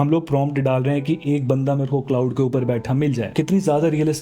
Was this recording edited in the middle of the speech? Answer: no; 0 cuts

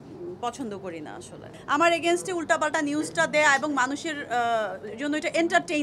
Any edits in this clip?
yes; 1 cut; at 1.5 s

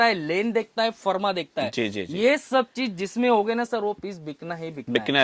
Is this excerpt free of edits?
yes; 0 cuts

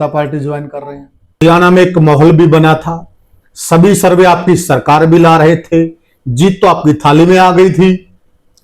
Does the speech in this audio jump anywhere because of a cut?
yes; 1 cut; at 1.4 s

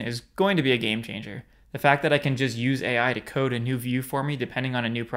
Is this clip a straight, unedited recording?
yes; 0 cuts

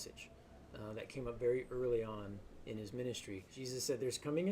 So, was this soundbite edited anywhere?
yes; 1 cut; at 3.5 s

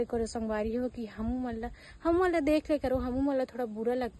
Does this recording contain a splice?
no; 0 cuts

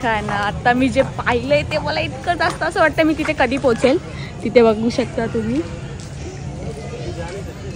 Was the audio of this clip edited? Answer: no; 0 cuts

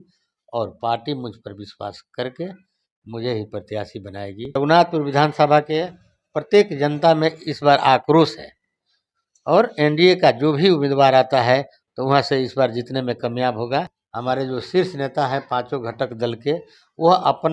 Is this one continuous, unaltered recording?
no; 2 cuts; at 4.6 s, 14.0 s

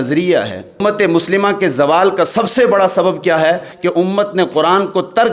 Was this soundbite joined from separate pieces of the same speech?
yes; 2 cuts; at 0.8 s, 3.7 s

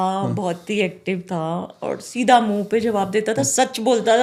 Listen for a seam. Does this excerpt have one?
no; 0 cuts

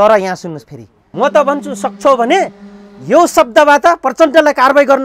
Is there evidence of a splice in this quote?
yes; 1 cut; at 1.1 s

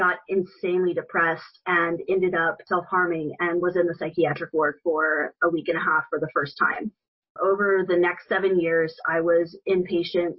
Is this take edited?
no; 0 cuts

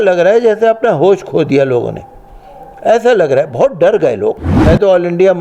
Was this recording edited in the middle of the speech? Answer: yes; 1 cut; at 4.5 s

